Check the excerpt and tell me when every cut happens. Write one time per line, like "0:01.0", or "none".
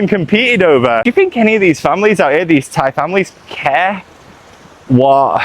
0:01.0